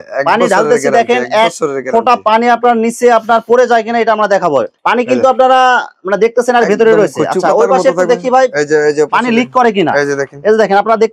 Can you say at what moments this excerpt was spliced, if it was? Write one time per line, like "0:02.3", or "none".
none